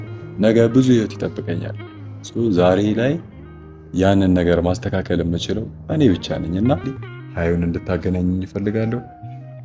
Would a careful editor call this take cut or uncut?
cut